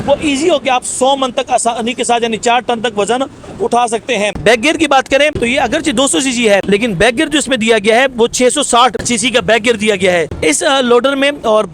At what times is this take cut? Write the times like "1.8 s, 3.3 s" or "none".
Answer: 4.4 s, 10.3 s